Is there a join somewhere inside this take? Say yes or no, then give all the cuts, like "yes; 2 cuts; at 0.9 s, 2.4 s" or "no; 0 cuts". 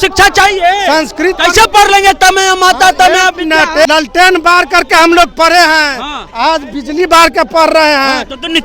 yes; 1 cut; at 3.9 s